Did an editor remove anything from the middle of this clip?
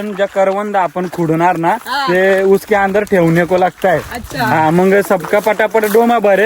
yes; 1 cut; at 5.0 s

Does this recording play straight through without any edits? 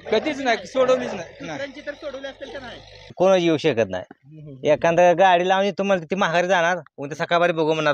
no; 1 cut; at 3.1 s

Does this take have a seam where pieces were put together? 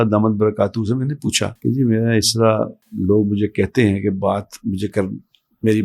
yes; 2 cuts; at 1.6 s, 2.8 s

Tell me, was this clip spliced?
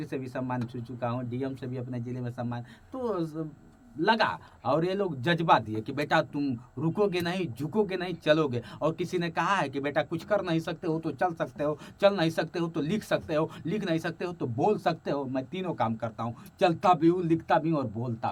no; 0 cuts

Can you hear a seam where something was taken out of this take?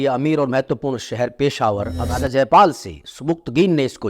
yes; 1 cut; at 2.0 s

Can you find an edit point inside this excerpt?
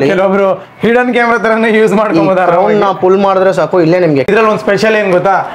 yes; 1 cut; at 4.3 s

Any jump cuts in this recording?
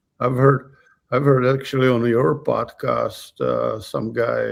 no; 0 cuts

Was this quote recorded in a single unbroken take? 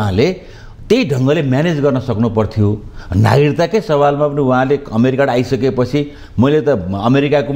yes; 0 cuts

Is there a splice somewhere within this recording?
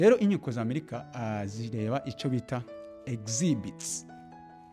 yes; 1 cut; at 3.8 s

